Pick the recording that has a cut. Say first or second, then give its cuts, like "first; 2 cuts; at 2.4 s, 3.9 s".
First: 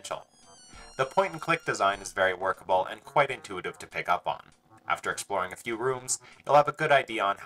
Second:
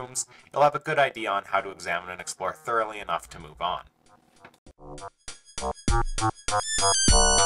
first; 1 cut; at 1.1 s